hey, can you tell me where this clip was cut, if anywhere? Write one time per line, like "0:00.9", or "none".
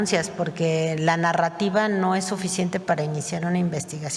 none